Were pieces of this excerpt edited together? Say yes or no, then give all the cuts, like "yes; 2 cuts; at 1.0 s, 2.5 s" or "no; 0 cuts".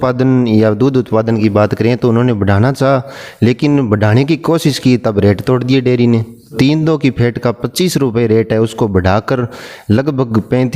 yes; 1 cut; at 6.5 s